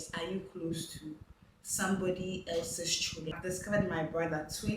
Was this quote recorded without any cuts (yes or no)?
no